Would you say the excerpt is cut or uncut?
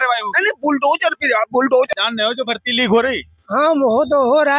cut